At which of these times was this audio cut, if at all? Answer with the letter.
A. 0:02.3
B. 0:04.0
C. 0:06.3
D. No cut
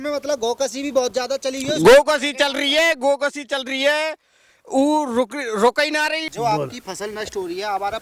C